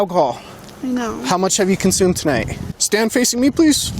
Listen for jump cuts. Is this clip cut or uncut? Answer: cut